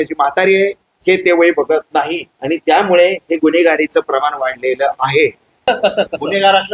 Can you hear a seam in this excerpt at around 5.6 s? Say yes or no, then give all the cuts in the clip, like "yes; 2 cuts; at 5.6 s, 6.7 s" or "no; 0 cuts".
yes; 1 cut; at 5.6 s